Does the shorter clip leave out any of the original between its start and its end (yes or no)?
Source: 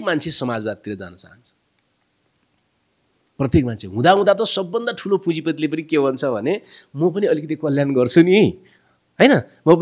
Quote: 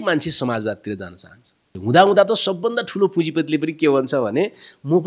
yes